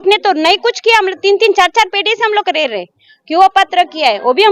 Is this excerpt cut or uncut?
uncut